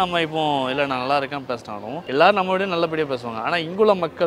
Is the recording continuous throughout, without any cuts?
no; 1 cut; at 2.0 s

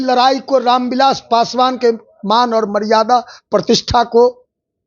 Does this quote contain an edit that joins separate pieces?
no; 0 cuts

